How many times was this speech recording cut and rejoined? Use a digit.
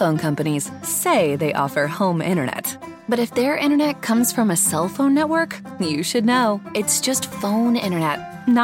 0